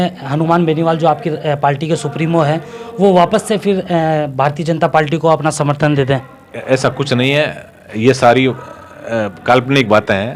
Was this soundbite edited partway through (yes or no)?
no